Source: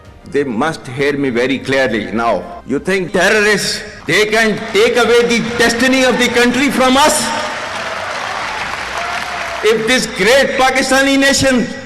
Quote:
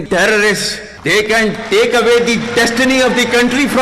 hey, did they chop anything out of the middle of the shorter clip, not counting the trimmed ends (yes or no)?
no